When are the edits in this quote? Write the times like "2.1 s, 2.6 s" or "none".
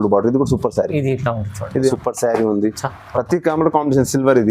1.9 s